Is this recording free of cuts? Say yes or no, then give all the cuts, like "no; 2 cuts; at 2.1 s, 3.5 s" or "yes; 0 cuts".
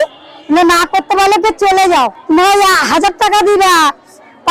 no; 1 cut; at 2.2 s